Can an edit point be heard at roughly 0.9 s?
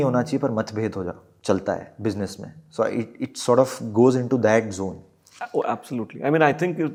no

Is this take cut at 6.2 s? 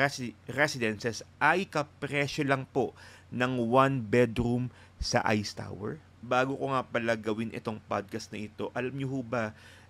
yes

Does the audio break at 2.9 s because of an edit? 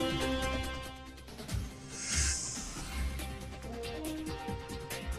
yes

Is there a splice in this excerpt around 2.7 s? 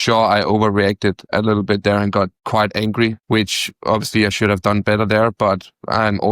yes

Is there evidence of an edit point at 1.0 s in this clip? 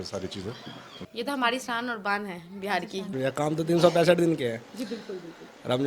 yes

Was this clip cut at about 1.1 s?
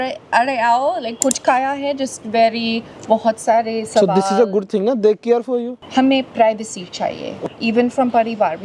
no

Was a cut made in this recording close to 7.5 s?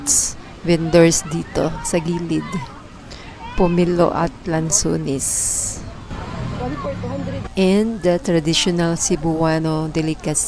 yes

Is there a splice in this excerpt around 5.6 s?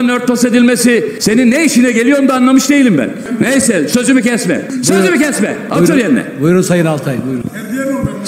yes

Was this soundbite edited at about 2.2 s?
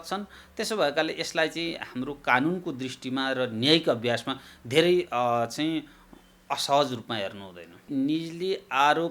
no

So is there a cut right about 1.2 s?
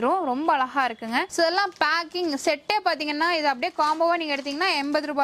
yes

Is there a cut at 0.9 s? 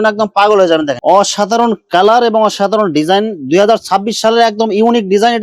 yes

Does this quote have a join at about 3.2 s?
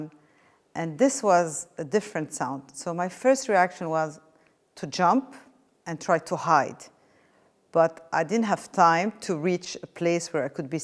no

